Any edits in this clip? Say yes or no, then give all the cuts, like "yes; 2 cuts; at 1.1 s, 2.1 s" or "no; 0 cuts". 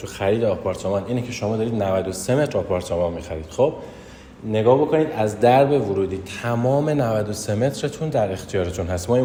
no; 0 cuts